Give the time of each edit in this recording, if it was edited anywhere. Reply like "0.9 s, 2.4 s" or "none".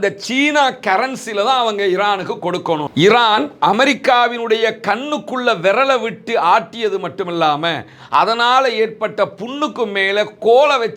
2.9 s